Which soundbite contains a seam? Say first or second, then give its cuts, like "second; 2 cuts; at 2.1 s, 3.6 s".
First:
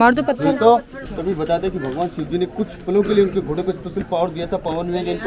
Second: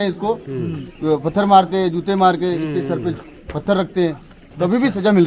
first; 1 cut; at 0.9 s